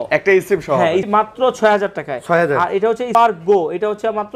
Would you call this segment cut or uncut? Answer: cut